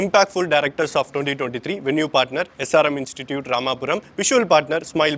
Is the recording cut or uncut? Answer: uncut